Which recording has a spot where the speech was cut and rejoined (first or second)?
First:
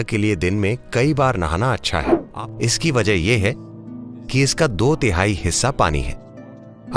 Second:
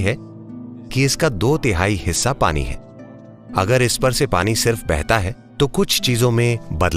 first